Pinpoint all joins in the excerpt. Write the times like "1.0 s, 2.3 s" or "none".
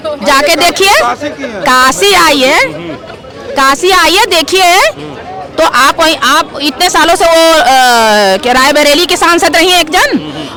none